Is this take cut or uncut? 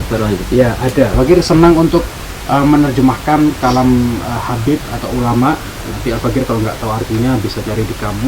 cut